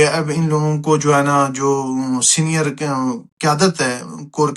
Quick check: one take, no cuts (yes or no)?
yes